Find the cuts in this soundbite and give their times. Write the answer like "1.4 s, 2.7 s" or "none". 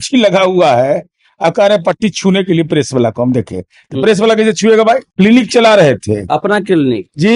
5.1 s